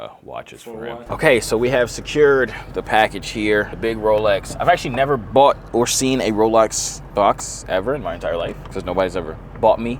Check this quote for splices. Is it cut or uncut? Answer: cut